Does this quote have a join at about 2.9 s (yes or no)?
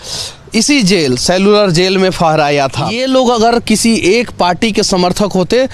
yes